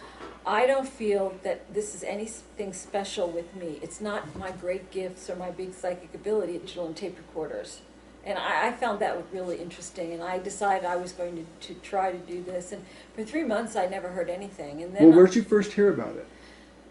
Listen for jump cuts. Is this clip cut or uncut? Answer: uncut